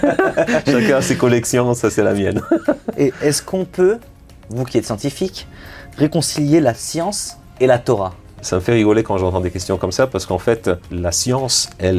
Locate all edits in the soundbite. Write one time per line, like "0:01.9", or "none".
none